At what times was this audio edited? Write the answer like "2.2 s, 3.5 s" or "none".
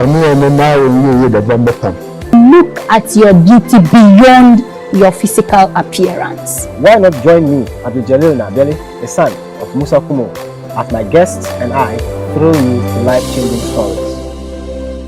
13.9 s